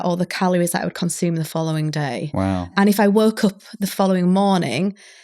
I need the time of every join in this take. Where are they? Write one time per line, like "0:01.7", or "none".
0:02.7